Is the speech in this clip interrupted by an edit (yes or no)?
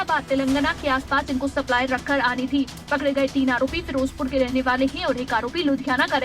yes